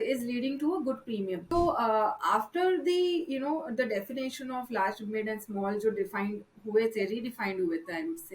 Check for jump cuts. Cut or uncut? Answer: cut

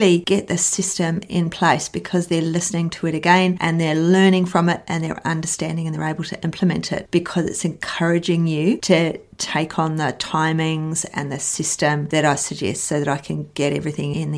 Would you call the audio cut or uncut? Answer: uncut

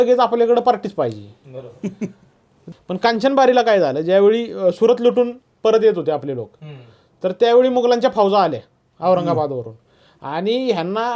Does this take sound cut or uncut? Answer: cut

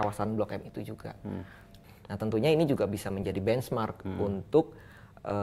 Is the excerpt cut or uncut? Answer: cut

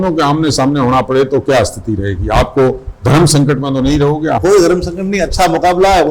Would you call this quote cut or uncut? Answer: uncut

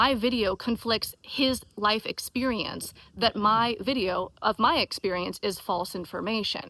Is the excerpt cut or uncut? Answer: uncut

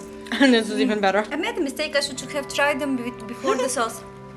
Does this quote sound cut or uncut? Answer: cut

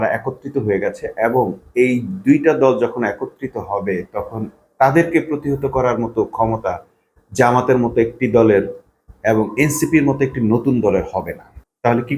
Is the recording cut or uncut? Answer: uncut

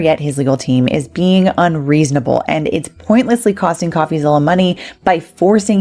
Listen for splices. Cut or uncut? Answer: uncut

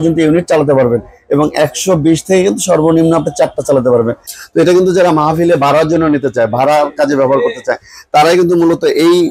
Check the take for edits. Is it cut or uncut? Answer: cut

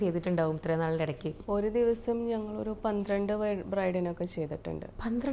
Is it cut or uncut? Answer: cut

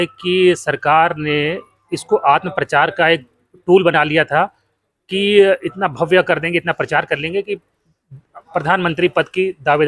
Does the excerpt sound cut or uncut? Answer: uncut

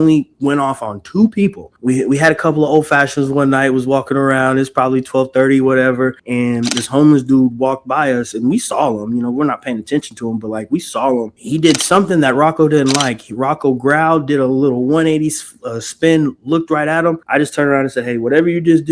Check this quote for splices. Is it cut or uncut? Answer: cut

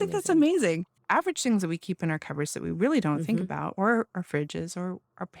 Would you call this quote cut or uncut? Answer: cut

